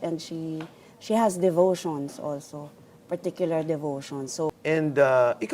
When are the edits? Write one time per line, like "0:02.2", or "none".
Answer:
0:04.5